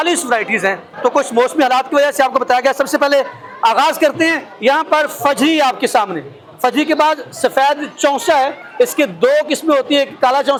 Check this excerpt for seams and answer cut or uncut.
uncut